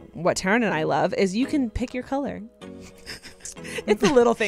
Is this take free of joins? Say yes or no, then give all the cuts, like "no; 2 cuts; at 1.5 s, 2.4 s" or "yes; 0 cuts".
yes; 0 cuts